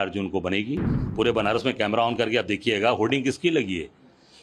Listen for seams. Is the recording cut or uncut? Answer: cut